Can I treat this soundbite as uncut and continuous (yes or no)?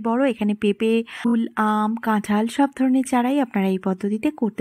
no